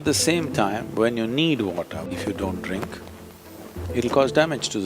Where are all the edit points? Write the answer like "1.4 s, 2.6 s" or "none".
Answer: 2.1 s